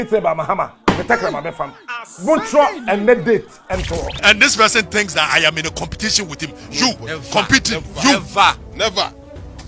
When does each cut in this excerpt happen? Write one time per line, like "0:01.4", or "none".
0:04.2